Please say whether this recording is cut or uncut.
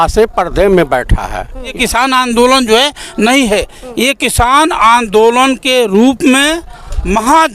cut